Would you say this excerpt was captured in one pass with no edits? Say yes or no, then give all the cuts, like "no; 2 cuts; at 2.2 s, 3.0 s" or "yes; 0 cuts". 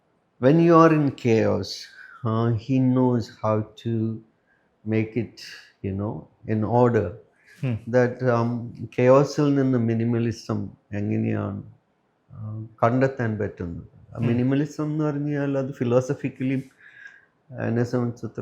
yes; 0 cuts